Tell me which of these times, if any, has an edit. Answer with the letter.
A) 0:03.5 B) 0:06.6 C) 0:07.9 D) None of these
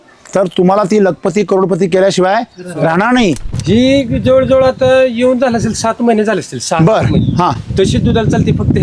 A